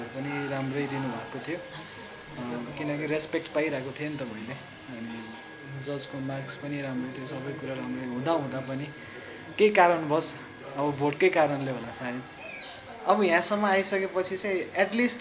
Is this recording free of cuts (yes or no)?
no